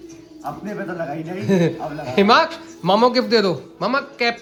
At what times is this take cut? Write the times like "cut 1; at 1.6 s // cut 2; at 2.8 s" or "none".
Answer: none

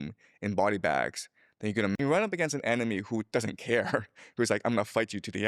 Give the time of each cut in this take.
cut 1; at 2.0 s

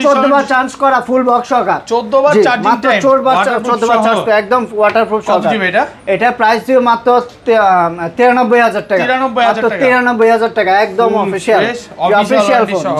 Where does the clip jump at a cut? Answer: none

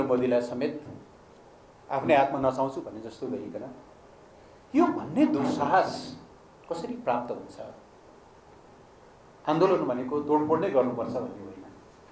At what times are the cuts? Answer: cut 1; at 8.8 s

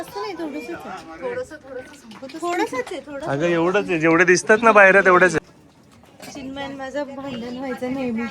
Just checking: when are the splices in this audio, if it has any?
cut 1; at 5.5 s

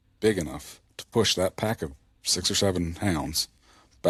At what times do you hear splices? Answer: none

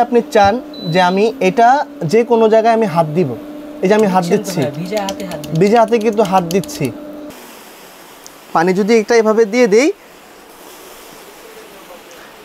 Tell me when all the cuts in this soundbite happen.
cut 1; at 7.2 s

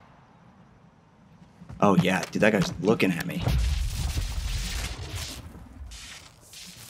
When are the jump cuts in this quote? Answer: none

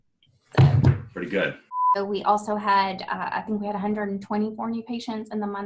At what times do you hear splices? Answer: cut 1; at 1.8 s

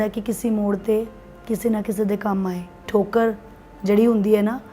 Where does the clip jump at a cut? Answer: cut 1; at 2.9 s

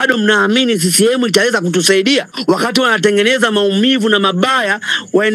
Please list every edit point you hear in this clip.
cut 1; at 2.3 s

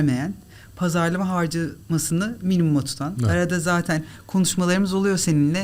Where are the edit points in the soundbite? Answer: none

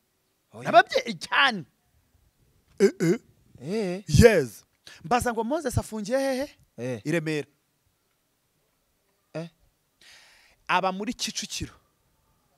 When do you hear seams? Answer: none

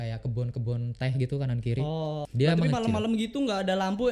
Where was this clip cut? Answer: cut 1; at 2.3 s

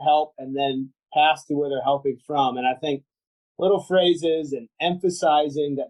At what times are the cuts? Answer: none

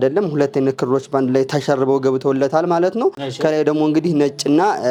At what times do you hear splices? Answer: none

